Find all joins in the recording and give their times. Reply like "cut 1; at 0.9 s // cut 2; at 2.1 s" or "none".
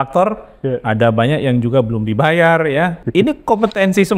cut 1; at 3.0 s

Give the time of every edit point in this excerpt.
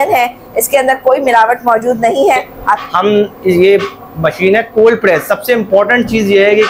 cut 1; at 2.8 s

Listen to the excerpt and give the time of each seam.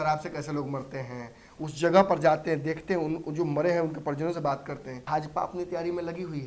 cut 1; at 5.0 s

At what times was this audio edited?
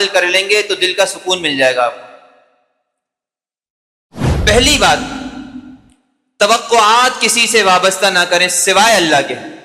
none

